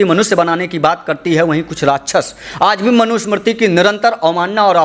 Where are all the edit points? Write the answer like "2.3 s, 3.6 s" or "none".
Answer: none